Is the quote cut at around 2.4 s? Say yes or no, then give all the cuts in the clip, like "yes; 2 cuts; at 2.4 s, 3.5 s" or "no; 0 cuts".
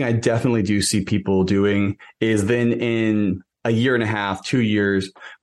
no; 0 cuts